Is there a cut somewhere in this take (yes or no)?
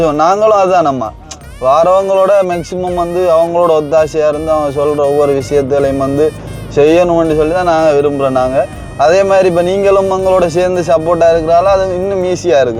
no